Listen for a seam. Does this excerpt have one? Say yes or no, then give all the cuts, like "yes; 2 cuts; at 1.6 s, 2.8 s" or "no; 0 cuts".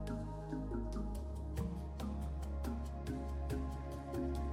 no; 0 cuts